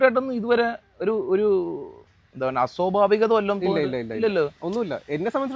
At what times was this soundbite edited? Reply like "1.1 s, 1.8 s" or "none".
none